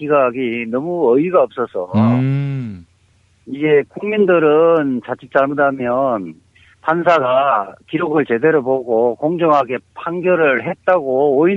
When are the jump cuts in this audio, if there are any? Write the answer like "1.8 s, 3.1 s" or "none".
2.6 s